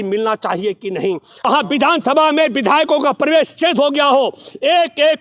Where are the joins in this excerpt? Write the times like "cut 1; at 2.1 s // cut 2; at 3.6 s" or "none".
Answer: cut 1; at 1.3 s